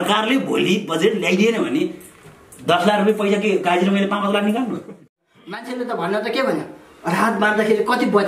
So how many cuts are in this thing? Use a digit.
1